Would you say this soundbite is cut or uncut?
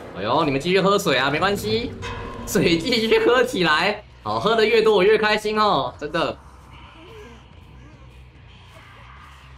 uncut